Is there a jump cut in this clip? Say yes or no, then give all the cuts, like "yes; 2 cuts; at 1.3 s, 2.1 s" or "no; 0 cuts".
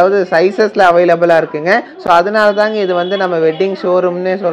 no; 0 cuts